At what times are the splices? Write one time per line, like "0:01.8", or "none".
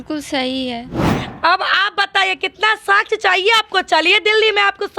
0:01.0